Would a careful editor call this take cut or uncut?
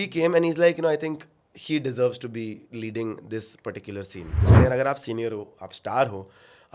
cut